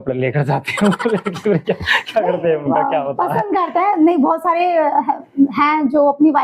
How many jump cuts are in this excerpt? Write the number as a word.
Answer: zero